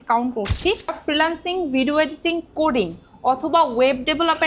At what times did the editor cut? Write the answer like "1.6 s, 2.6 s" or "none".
1.0 s

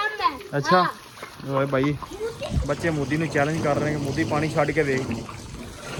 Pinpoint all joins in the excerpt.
none

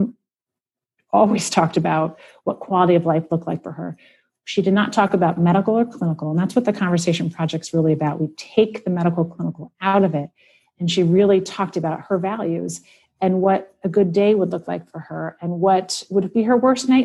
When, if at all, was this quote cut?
none

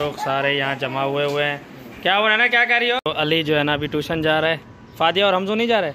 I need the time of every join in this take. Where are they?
3.0 s

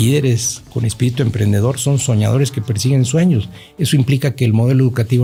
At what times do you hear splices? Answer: none

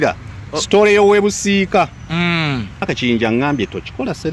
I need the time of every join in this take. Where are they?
2.9 s

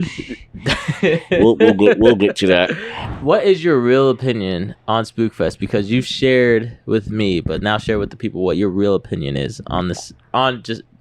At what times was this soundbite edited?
3.1 s

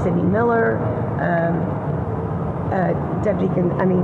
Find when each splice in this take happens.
none

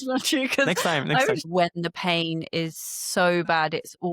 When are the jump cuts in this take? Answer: 1.5 s

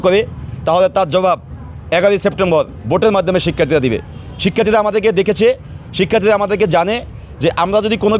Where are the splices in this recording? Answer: none

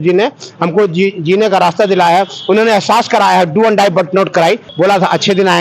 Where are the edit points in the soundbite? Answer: 4.7 s

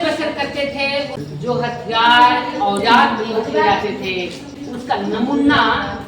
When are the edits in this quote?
1.2 s, 4.5 s

